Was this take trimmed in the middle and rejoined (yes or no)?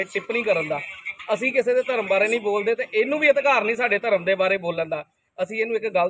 no